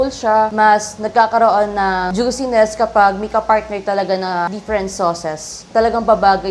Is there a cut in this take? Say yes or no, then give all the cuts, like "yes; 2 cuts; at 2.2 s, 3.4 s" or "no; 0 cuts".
yes; 3 cuts; at 2.1 s, 4.5 s, 5.7 s